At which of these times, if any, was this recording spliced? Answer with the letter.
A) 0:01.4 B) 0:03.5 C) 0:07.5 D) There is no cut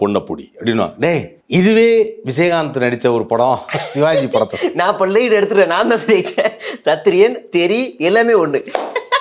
A